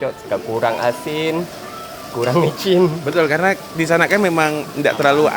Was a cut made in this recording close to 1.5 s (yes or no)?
no